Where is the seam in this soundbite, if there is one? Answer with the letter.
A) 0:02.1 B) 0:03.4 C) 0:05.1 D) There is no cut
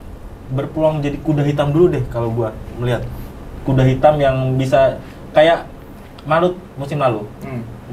D